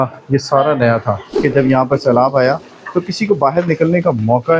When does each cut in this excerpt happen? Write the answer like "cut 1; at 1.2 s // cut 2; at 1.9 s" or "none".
cut 1; at 1.2 s